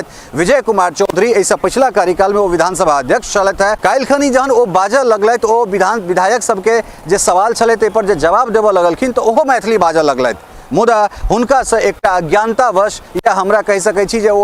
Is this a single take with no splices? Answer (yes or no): no